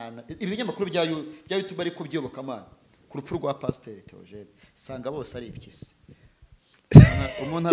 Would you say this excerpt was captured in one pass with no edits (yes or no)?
yes